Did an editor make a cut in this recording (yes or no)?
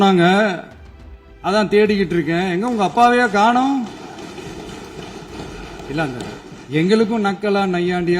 yes